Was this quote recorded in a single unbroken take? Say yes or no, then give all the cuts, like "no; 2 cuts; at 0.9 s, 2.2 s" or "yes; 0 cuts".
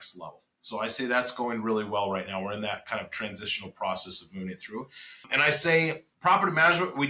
no; 2 cuts; at 5.3 s, 6.1 s